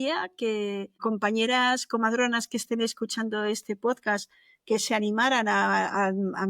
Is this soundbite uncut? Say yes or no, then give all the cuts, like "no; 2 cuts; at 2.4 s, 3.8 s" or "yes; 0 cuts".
no; 1 cut; at 1.0 s